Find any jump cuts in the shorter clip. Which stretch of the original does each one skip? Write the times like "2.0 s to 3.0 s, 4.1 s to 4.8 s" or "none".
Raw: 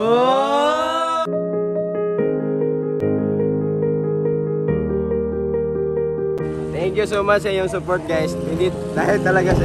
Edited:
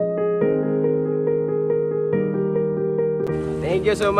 2.9 s to 3.7 s, 5.8 s to 6.4 s